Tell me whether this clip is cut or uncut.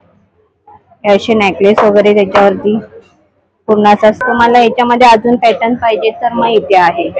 cut